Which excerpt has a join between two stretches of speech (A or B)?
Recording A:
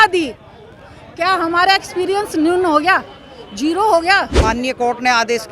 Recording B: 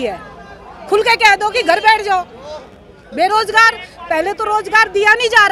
A